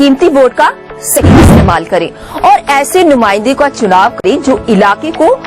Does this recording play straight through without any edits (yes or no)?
no